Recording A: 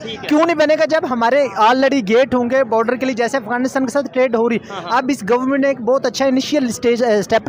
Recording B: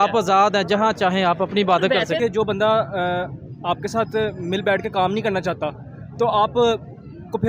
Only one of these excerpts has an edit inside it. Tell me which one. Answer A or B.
B